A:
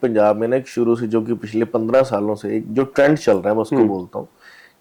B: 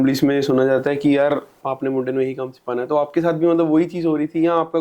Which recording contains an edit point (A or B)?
B